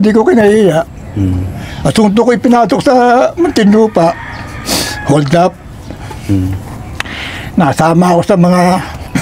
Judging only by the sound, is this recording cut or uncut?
uncut